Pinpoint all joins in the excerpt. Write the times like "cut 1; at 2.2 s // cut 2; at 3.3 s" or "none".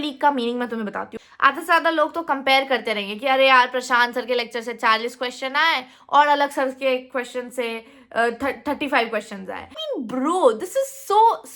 cut 1; at 1.2 s // cut 2; at 9.8 s